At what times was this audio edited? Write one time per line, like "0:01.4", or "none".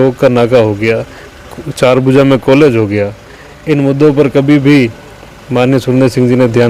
none